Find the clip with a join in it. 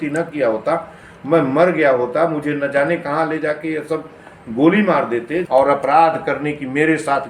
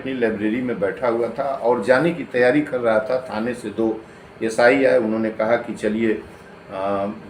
first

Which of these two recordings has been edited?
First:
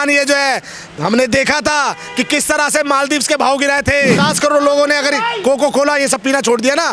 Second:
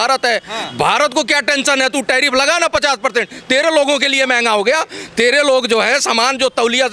first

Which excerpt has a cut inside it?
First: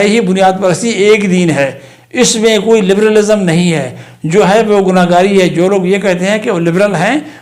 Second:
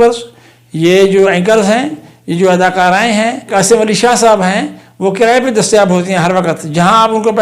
second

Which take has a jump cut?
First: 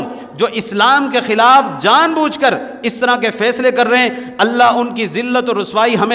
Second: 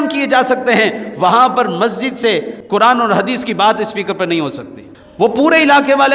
second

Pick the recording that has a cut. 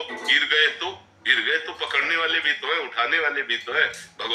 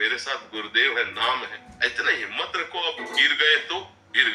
second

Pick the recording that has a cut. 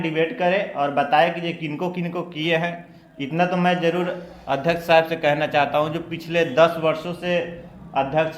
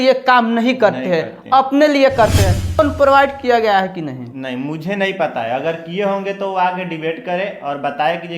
second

